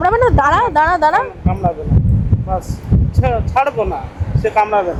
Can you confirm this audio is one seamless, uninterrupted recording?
yes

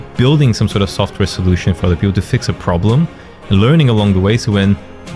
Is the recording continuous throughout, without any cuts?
yes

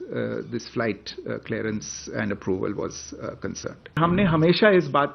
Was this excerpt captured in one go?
no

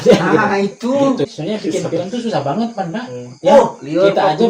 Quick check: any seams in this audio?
yes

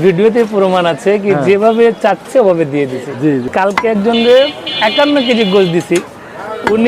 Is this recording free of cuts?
no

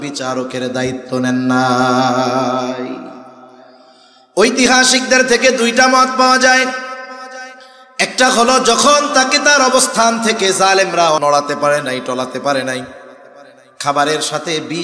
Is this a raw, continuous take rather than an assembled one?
no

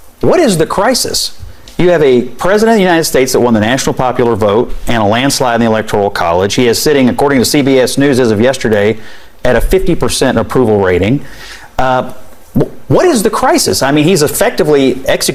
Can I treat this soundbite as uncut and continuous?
yes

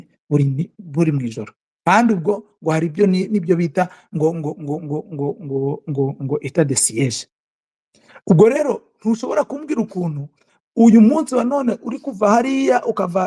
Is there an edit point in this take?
no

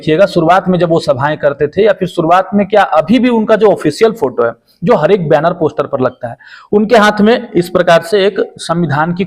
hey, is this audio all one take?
yes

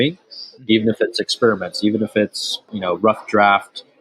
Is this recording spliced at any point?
yes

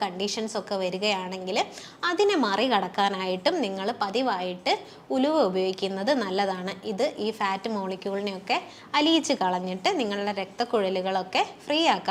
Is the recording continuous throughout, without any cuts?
yes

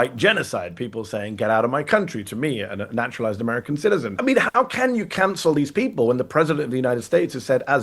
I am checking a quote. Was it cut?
yes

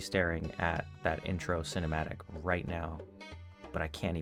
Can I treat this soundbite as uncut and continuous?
yes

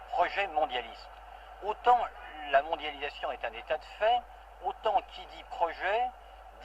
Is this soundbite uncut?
no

